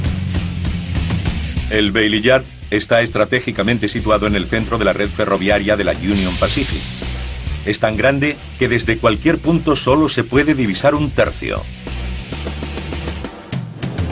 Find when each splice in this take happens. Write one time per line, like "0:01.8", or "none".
0:07.4